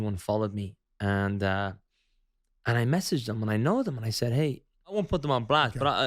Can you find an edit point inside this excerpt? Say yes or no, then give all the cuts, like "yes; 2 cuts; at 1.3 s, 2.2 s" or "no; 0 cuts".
yes; 1 cut; at 5.0 s